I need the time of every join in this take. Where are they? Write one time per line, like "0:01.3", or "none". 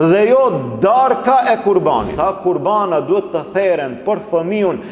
0:02.1